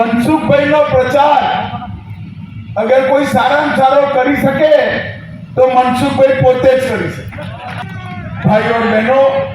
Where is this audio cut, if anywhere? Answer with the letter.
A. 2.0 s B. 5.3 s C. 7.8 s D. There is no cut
C